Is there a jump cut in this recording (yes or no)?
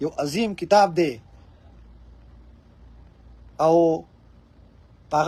no